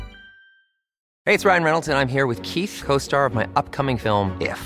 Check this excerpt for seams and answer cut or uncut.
cut